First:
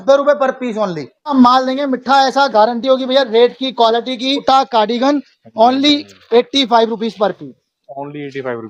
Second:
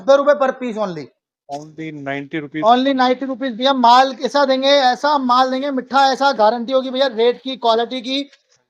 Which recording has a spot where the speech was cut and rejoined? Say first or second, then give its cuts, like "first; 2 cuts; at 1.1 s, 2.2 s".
first; 2 cuts; at 1.3 s, 4.4 s